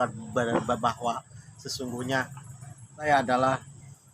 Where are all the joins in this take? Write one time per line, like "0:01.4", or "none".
0:03.1